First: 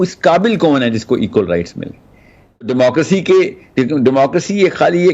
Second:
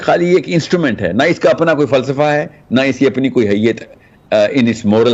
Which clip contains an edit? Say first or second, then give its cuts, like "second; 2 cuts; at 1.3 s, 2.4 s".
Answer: first; 1 cut; at 2.7 s